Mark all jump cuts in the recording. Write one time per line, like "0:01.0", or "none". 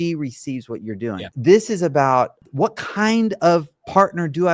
0:01.3
0:02.4